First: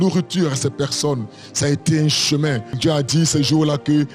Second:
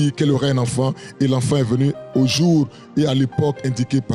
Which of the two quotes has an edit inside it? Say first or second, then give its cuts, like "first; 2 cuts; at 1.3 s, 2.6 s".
first; 1 cut; at 2.8 s